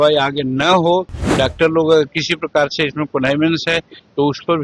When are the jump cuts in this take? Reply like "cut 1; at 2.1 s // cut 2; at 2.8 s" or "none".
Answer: cut 1; at 1.2 s